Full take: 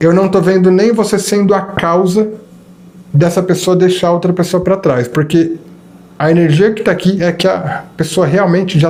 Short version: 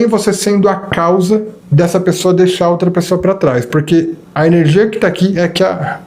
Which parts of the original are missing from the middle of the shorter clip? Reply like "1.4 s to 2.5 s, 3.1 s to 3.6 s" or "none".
2.4 s to 3.0 s, 5.6 s to 6.1 s